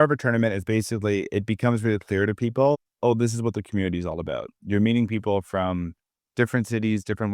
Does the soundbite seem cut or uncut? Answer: uncut